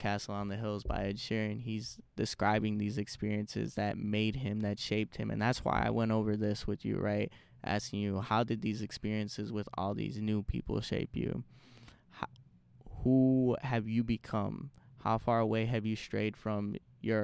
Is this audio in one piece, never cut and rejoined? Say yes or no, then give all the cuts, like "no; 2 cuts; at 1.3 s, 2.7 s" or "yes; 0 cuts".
yes; 0 cuts